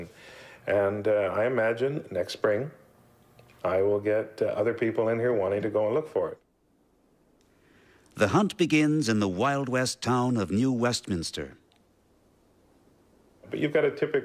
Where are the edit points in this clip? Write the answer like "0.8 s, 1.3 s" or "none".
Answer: none